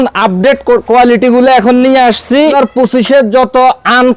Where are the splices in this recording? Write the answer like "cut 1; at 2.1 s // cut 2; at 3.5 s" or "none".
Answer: cut 1; at 2.5 s